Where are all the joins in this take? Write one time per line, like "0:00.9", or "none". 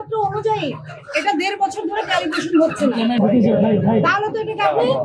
none